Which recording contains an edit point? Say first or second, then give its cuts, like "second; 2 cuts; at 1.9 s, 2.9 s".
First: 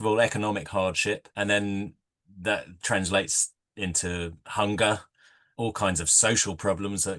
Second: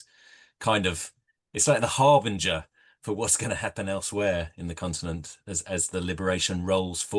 first; 2 cuts; at 1.3 s, 5.4 s